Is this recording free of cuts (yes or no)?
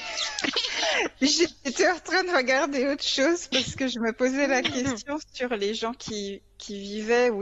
yes